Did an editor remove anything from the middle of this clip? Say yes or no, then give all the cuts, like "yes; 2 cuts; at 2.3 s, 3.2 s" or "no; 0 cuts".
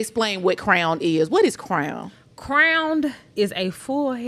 yes; 1 cut; at 3.2 s